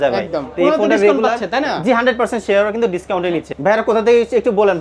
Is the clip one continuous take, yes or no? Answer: no